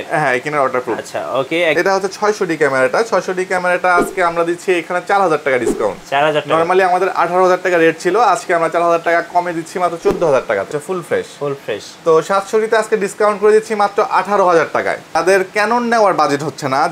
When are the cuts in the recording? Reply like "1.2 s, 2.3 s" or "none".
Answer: 1.7 s, 10.7 s, 15.2 s